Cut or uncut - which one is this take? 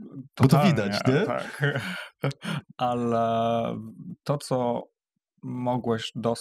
uncut